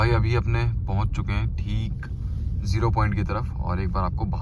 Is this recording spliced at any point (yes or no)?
no